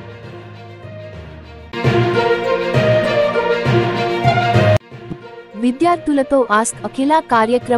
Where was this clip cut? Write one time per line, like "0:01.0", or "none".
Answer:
none